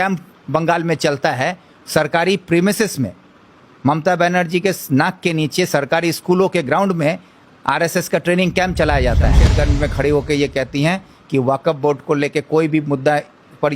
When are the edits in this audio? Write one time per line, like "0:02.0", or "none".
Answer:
0:09.5